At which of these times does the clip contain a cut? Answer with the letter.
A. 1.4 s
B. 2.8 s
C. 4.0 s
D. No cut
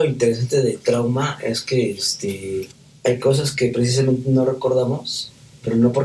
B